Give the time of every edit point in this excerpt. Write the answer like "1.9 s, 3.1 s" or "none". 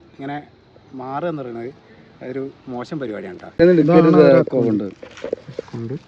3.6 s